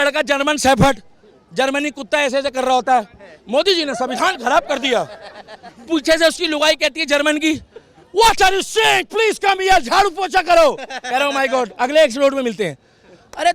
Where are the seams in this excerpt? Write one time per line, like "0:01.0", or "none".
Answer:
none